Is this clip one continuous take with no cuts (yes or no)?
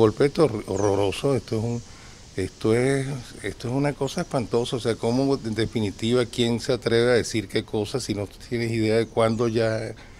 yes